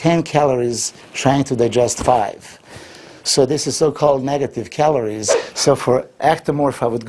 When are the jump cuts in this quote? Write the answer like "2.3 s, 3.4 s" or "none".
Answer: 5.3 s